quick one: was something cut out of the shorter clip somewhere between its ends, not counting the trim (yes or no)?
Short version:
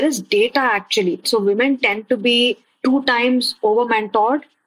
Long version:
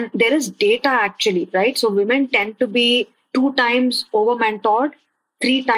yes